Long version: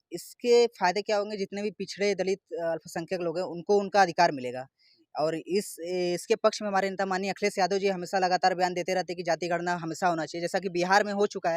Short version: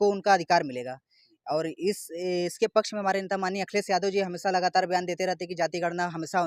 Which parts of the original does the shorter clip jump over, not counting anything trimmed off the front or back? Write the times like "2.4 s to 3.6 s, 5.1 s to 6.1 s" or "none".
none